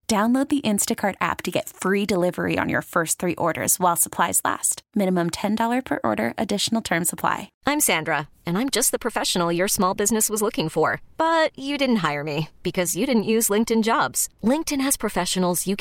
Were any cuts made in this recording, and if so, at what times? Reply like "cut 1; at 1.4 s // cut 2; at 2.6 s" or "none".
cut 1; at 7.5 s